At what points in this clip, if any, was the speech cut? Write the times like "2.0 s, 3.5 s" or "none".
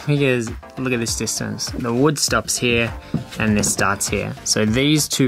none

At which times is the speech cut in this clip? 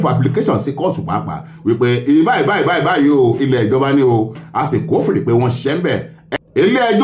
none

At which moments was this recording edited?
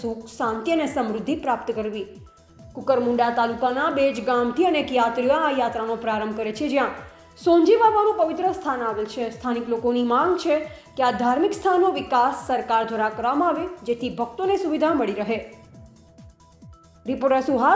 15.6 s, 17.0 s

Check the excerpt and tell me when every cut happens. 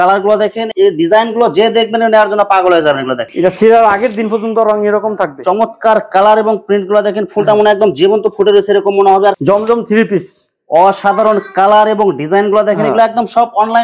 3.2 s, 9.4 s

